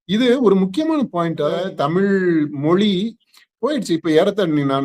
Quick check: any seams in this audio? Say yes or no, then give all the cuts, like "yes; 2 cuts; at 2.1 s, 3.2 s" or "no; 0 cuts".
yes; 1 cut; at 1.7 s